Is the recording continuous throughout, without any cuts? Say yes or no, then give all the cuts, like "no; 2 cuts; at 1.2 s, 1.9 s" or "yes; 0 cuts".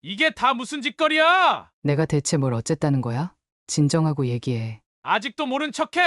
no; 1 cut; at 1.7 s